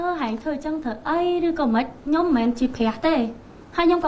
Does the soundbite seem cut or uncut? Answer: uncut